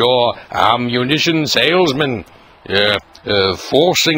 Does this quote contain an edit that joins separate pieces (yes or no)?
no